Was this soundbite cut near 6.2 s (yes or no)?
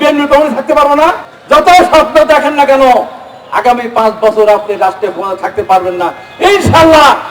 no